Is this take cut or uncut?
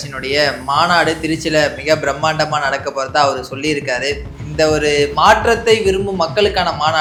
uncut